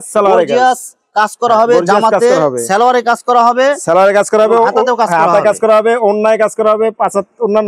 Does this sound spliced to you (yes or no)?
no